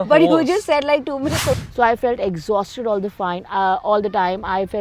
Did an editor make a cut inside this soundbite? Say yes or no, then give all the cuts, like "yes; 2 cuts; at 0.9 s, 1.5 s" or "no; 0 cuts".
yes; 1 cut; at 1.6 s